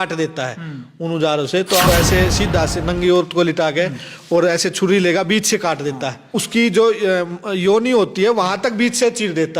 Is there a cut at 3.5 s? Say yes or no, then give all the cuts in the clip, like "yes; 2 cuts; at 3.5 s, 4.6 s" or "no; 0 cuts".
no; 2 cuts; at 1.9 s, 6.3 s